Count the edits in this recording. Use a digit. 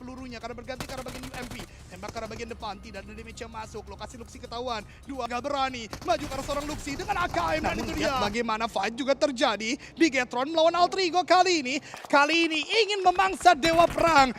3